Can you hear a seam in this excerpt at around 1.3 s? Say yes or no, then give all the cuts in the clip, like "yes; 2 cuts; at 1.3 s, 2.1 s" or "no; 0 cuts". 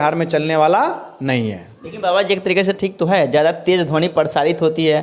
no; 0 cuts